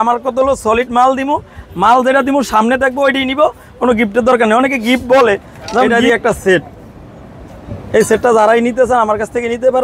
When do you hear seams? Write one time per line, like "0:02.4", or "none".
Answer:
0:05.9